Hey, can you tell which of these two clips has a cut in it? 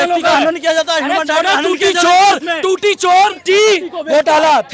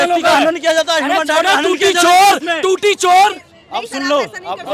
first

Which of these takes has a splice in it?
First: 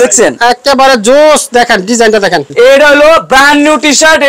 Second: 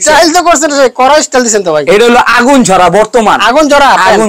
first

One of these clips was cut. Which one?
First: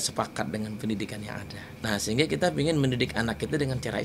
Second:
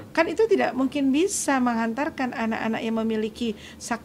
first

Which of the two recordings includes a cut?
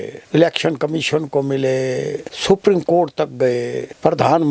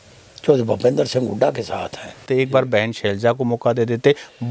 second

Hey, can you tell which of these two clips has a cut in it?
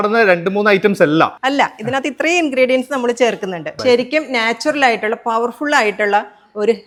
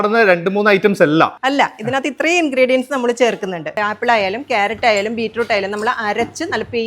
second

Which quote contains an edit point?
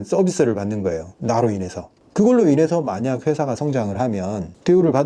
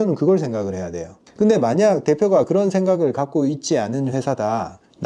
first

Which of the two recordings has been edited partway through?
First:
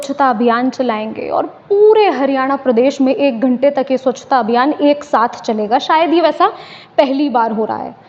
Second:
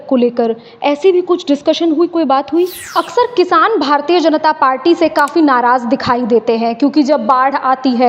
second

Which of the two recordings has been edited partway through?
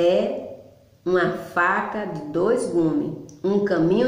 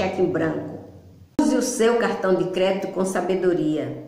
second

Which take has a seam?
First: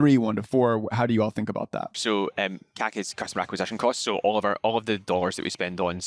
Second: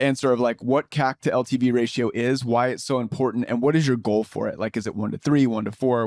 first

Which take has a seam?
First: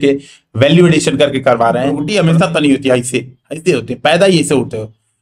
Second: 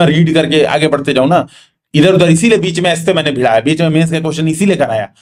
first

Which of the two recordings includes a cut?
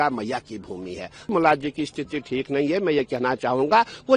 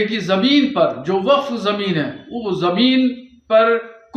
first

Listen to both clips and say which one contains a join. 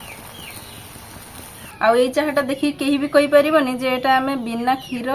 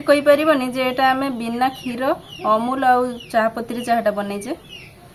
first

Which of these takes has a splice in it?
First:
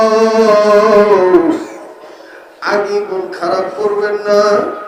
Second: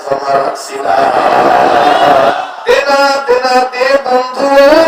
second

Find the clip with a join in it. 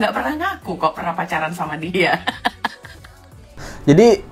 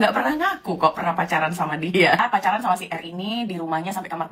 second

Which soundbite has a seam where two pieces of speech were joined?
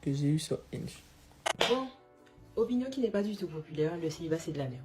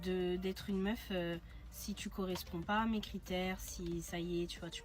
first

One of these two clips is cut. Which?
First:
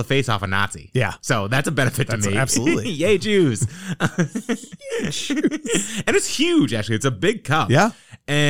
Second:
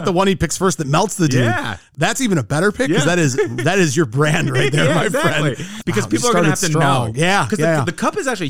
second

